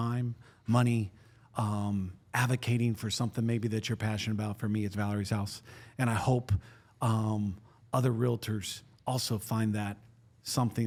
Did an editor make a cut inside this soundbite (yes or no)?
no